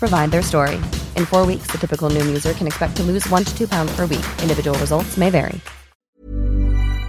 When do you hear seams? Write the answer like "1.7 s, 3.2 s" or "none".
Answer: 6.2 s